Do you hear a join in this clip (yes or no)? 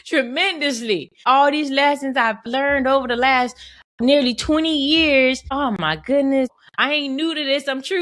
yes